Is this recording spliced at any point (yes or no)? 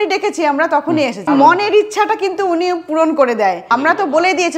yes